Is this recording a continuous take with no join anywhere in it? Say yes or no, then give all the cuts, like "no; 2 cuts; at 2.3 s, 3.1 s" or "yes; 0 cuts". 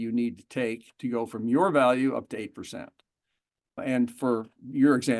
no; 1 cut; at 3.8 s